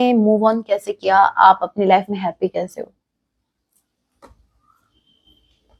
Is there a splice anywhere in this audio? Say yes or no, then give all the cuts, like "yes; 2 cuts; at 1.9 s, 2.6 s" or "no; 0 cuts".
no; 0 cuts